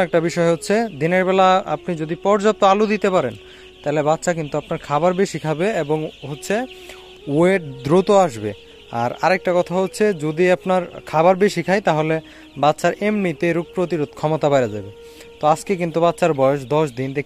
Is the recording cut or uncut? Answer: uncut